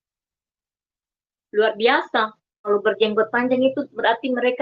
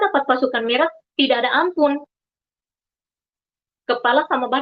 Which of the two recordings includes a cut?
first; 1 cut; at 2.6 s

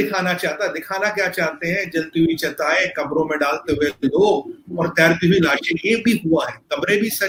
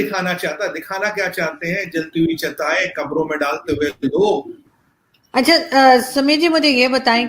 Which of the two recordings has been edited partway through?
second; 1 cut; at 4.7 s

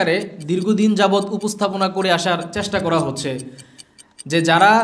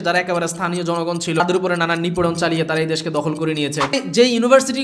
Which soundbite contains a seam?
second; 2 cuts; at 1.4 s, 3.9 s

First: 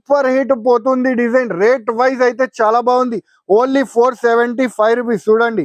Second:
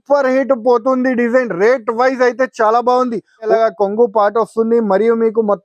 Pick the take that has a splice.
second; 1 cut; at 3.5 s

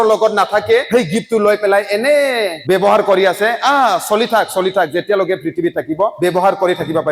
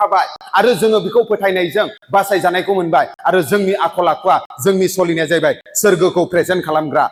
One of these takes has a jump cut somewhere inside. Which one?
first; 3 cuts; at 0.9 s, 2.6 s, 6.1 s

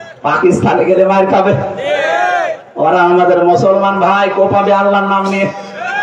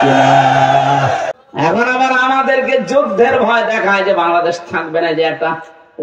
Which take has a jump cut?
second; 1 cut; at 1.4 s

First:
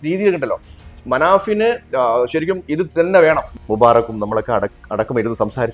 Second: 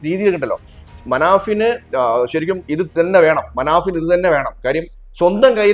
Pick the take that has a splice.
first; 1 cut; at 3.5 s

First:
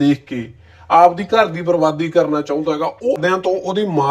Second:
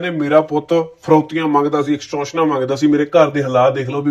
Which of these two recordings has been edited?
first; 1 cut; at 3.2 s

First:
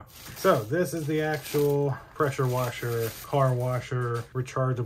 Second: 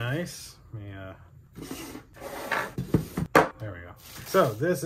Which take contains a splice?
first; 1 cut; at 3.2 s

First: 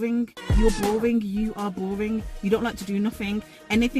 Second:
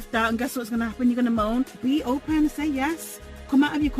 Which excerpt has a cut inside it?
second; 1 cut; at 1.7 s

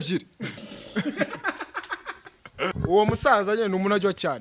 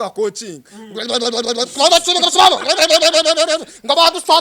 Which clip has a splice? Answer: first; 1 cut; at 2.7 s

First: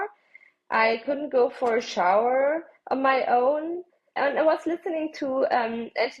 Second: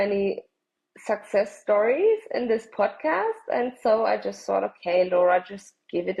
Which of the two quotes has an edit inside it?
first; 1 cut; at 4.2 s

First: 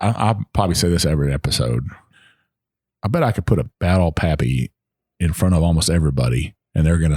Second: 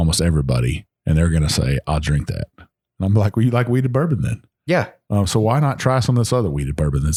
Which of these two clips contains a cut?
first; 2 cuts; at 2.0 s, 3.7 s

